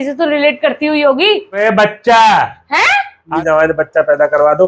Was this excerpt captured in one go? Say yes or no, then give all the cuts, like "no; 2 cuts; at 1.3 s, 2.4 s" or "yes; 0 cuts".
no; 2 cuts; at 1.5 s, 3.3 s